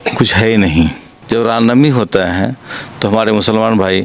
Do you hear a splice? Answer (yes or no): yes